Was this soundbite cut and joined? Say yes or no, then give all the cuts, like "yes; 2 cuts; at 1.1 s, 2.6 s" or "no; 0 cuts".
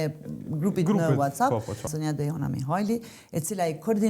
yes; 1 cut; at 1.9 s